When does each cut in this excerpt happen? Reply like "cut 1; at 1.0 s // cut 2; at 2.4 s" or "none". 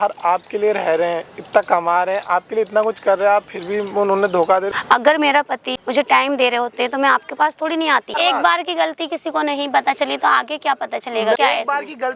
cut 1; at 4.7 s // cut 2; at 5.7 s // cut 3; at 8.2 s // cut 4; at 11.4 s